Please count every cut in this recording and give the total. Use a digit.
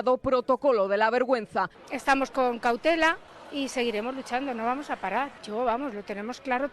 3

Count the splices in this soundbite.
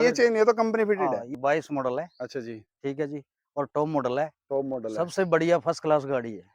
1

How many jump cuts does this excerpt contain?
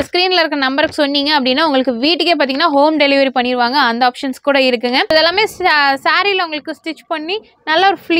1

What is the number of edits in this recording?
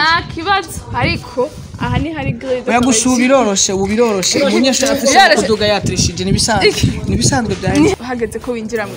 1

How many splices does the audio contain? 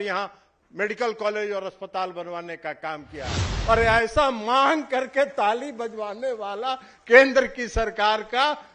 1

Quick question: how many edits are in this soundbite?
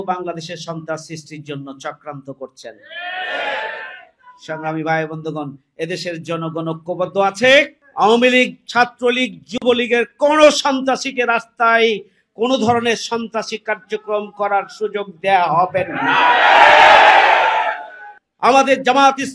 1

